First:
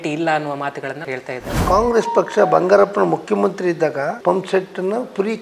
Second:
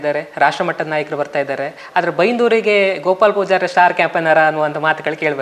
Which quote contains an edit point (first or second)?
first